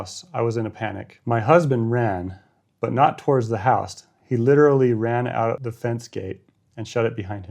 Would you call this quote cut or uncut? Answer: cut